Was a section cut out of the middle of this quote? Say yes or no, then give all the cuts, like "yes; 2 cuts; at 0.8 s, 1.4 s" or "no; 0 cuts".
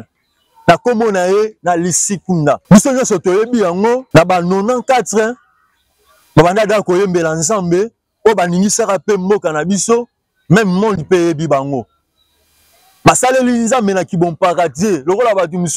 yes; 2 cuts; at 2.6 s, 4.0 s